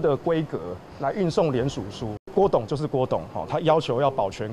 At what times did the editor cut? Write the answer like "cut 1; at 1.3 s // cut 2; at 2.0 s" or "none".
cut 1; at 2.2 s